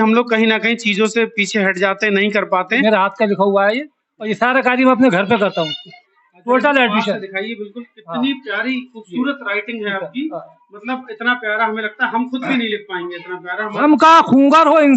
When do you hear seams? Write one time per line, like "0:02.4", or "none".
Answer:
0:02.8
0:13.8